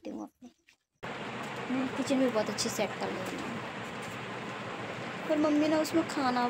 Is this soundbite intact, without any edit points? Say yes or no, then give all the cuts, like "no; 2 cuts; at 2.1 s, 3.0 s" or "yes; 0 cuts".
no; 1 cut; at 1.0 s